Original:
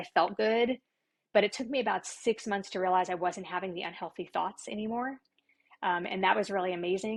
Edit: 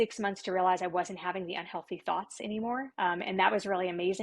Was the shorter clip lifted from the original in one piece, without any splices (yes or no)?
no